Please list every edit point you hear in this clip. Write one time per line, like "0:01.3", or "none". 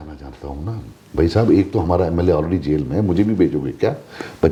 none